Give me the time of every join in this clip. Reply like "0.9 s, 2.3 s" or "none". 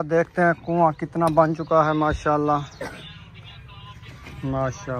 none